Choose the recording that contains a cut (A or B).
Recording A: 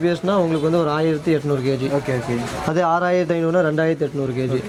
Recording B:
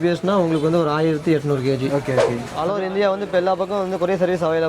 B